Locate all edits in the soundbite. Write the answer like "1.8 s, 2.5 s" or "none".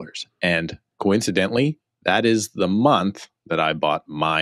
none